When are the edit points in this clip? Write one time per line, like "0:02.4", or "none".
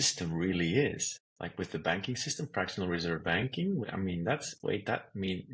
0:01.7
0:03.9